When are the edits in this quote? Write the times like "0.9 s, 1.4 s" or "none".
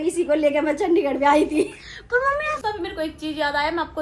2.5 s